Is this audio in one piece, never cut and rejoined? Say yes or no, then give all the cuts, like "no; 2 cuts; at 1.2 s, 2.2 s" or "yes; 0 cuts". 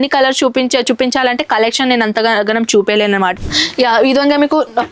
no; 1 cut; at 3.3 s